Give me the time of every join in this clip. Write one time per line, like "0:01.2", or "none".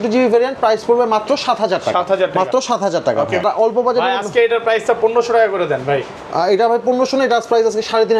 0:03.4